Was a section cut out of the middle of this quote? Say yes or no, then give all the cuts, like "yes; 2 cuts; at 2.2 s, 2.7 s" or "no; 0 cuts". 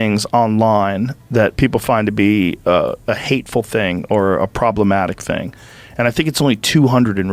no; 0 cuts